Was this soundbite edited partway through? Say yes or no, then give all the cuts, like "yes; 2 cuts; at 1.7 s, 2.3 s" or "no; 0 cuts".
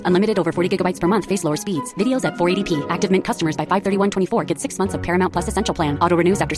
no; 0 cuts